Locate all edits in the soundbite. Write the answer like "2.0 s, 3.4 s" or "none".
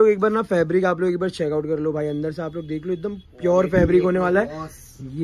none